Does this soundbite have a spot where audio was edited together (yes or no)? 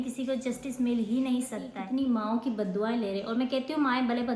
yes